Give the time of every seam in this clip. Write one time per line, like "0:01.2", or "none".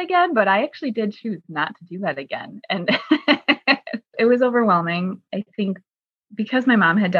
0:04.1